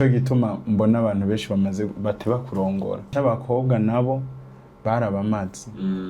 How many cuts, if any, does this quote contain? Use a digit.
1